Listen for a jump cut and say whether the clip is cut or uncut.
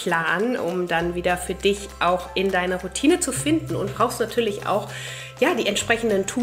uncut